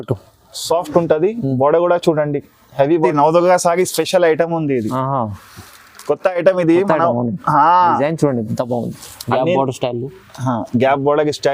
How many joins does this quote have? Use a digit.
1